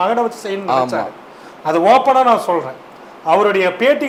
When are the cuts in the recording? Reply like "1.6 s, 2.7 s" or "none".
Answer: none